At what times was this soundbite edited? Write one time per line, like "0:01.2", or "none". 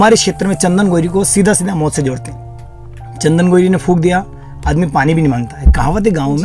none